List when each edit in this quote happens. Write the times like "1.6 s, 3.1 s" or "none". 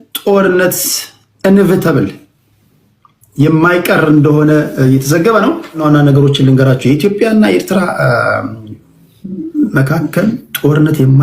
5.8 s